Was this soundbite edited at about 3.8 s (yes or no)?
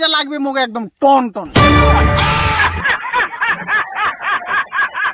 no